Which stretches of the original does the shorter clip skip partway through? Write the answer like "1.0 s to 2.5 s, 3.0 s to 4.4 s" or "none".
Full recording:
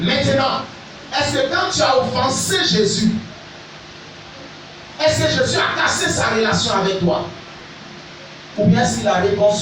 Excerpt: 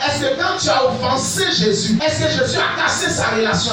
3.1 s to 5.0 s